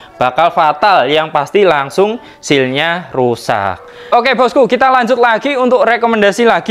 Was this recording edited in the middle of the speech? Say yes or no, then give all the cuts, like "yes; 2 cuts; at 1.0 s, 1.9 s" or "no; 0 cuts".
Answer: yes; 1 cut; at 4.1 s